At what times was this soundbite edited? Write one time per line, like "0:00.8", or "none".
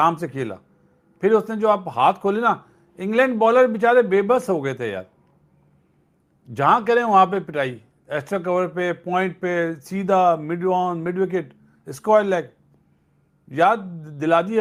none